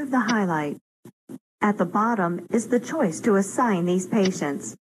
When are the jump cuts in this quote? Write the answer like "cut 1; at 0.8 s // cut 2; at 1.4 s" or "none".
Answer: cut 1; at 1.4 s

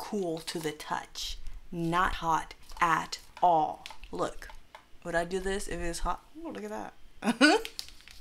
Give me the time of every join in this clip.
none

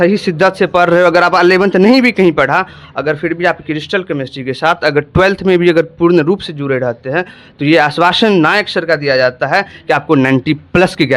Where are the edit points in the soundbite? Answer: none

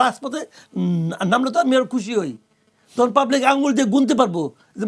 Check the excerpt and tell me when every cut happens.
none

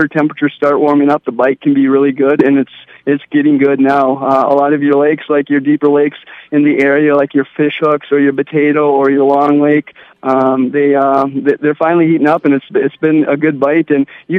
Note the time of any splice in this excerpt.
none

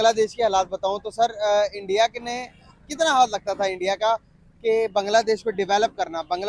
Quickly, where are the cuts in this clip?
none

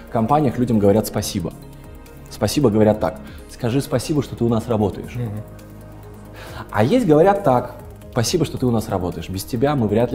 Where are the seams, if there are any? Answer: none

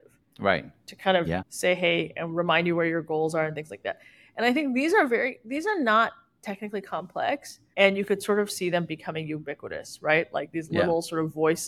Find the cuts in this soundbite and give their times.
none

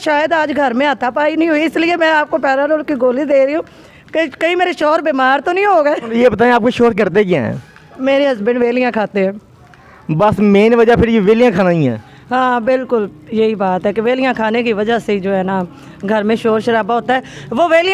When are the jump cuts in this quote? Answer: none

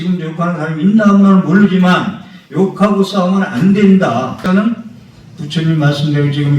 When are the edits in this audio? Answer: cut 1; at 4.4 s

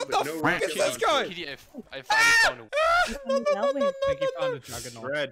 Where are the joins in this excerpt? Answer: none

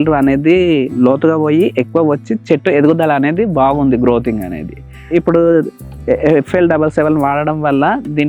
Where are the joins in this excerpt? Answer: cut 1; at 5.1 s

